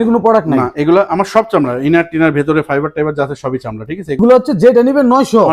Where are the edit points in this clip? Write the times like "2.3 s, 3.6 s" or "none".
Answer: 4.2 s